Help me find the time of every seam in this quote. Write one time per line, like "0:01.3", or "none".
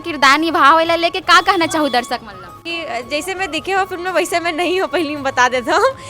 0:02.7

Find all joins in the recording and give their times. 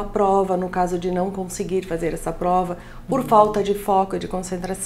none

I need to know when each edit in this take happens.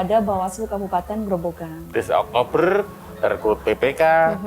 0:01.9

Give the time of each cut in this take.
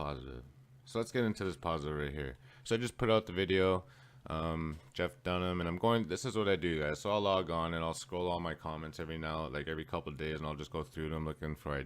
0:03.9

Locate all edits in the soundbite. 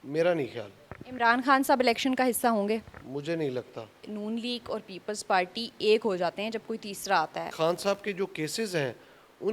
0:04.1
0:07.5

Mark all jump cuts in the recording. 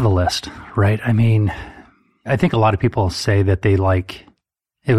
0:02.3

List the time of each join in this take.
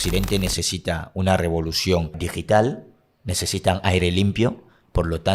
0:02.3

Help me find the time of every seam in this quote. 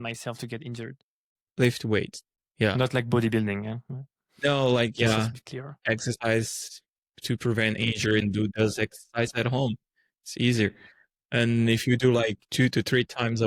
none

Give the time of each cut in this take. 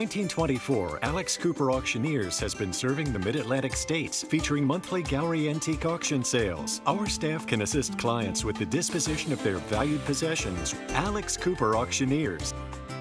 none

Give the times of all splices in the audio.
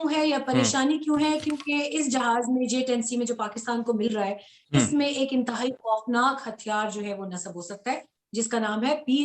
none

